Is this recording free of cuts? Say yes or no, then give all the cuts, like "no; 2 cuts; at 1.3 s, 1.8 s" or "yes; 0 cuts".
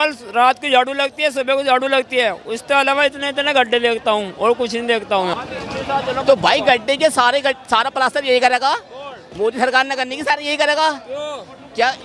no; 1 cut; at 5.3 s